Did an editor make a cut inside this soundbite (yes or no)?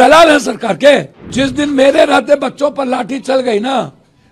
yes